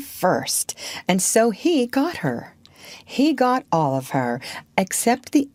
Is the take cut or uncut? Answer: uncut